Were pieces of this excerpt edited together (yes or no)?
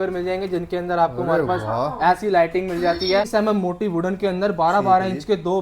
yes